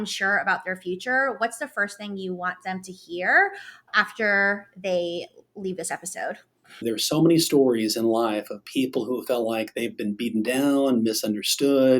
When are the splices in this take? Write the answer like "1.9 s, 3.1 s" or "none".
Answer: 6.8 s